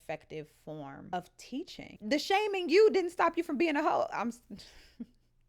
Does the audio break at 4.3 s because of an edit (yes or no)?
no